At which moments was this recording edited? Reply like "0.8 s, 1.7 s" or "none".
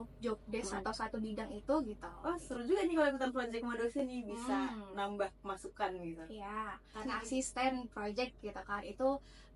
2.1 s, 6.9 s